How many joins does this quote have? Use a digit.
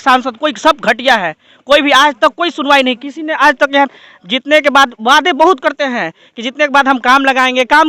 0